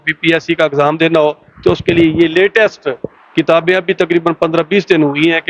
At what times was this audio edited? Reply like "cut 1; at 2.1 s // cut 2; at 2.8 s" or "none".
none